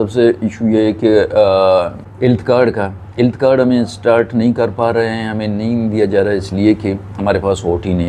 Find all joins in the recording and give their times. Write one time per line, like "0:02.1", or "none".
0:02.0